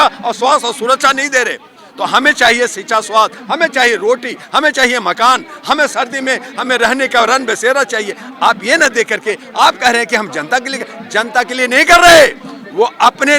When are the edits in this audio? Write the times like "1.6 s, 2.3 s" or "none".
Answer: none